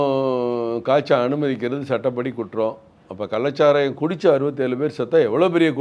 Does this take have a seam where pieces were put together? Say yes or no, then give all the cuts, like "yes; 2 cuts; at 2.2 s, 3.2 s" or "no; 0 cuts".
no; 0 cuts